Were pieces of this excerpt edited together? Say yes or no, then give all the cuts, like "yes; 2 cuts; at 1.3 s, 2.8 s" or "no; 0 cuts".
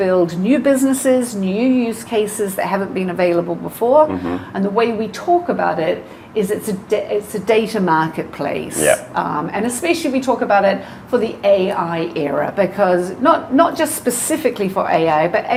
no; 0 cuts